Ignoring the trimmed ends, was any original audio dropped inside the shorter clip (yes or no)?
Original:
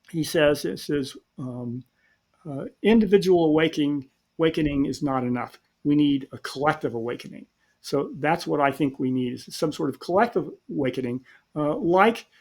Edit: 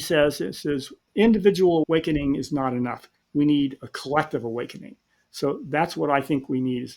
yes